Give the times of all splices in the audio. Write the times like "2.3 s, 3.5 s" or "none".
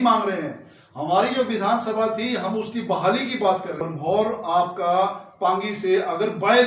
3.9 s